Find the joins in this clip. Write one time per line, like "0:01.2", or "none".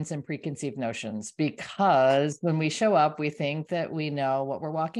none